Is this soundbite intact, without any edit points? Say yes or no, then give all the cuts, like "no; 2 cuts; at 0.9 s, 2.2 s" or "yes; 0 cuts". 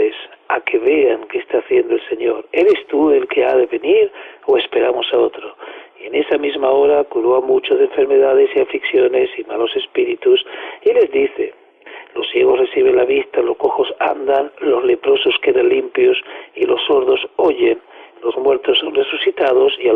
yes; 0 cuts